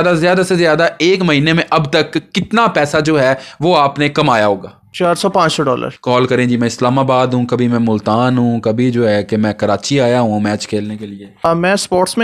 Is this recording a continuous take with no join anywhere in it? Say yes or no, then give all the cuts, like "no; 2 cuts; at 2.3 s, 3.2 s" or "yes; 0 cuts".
no; 1 cut; at 5.9 s